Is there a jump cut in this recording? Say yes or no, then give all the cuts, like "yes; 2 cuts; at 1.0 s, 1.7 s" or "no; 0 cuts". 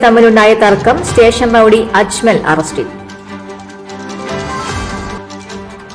no; 0 cuts